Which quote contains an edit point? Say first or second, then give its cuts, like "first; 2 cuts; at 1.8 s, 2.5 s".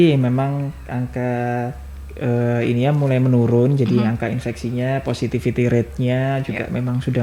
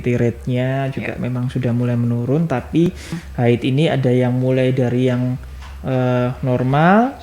second; 1 cut; at 3.2 s